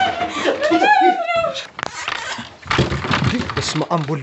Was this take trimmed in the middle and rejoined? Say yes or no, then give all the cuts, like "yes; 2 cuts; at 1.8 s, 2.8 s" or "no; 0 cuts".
yes; 1 cut; at 1.6 s